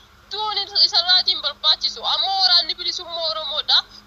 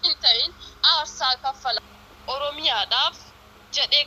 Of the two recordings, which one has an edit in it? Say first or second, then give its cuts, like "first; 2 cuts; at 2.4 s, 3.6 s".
second; 1 cut; at 1.8 s